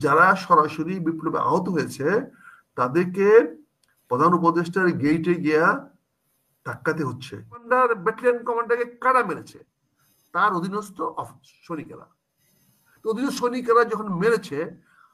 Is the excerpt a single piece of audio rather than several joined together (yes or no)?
no